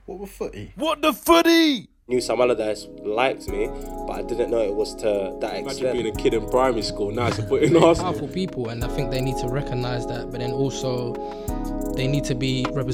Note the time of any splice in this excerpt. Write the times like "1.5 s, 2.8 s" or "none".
1.9 s